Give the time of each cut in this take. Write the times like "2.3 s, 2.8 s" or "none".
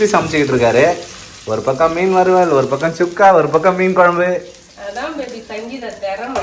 none